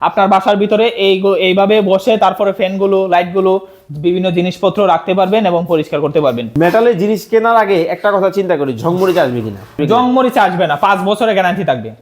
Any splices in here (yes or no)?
yes